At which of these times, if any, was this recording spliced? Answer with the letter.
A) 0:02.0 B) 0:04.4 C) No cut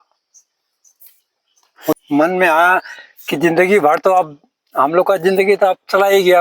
A